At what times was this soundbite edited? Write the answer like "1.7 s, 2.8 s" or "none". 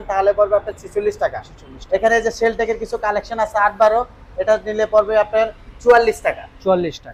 none

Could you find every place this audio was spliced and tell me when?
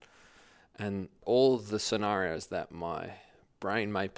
1.2 s

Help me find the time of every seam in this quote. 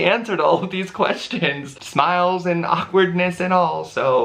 1.8 s

